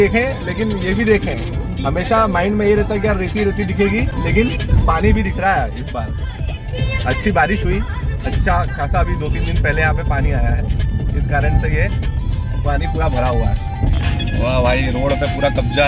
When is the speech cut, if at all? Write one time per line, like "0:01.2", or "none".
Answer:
none

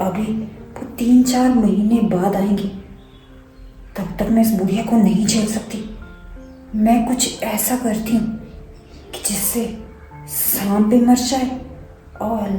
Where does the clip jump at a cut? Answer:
none

